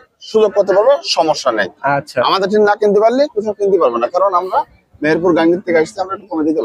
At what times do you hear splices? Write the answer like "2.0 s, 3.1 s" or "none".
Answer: none